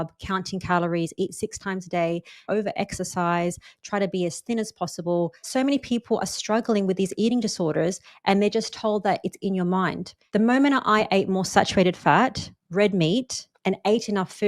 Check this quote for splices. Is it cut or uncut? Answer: cut